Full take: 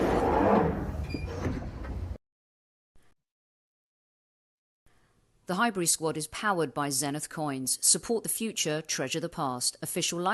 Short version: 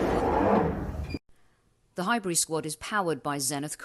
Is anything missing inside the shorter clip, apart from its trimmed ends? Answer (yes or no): yes